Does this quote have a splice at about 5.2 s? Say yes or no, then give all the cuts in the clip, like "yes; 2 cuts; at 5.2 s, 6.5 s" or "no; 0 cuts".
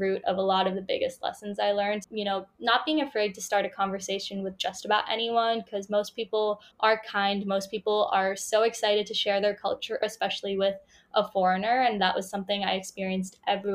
no; 3 cuts; at 2.0 s, 6.7 s, 10.0 s